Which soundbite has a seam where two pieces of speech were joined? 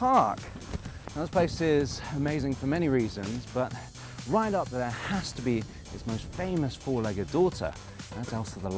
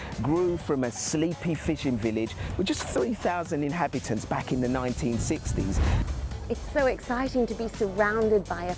second; 1 cut; at 6.1 s

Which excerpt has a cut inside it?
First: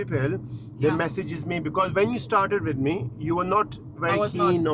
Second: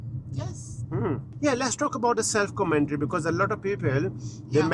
second; 1 cut; at 1.3 s

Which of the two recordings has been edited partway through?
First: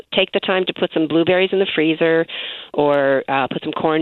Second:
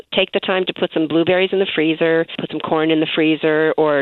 second; 1 cut; at 2.5 s

